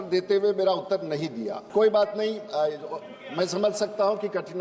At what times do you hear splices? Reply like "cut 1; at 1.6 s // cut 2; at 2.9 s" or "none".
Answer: cut 1; at 1.6 s